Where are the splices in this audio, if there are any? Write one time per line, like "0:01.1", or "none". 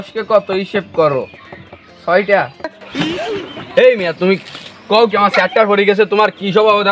0:02.8